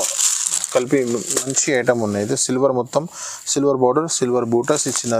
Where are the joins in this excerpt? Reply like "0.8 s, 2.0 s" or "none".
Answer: none